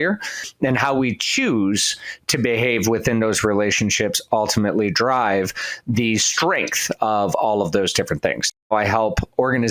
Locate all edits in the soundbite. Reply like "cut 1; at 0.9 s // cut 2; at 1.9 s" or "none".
cut 1; at 8.6 s

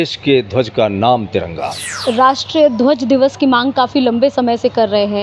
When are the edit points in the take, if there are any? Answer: cut 1; at 1.9 s

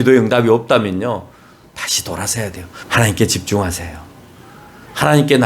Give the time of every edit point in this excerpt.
cut 1; at 2.8 s

